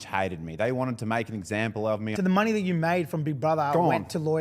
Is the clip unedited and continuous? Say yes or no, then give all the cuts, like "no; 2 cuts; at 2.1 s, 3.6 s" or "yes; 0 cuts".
no; 1 cut; at 2.1 s